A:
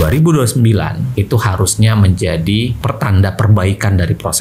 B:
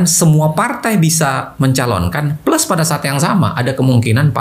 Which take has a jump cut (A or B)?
A